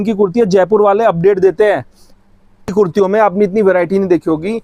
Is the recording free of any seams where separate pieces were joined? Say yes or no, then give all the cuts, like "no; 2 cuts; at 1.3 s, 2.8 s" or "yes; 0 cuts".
no; 1 cut; at 2.7 s